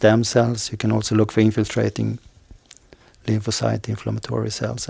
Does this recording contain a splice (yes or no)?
no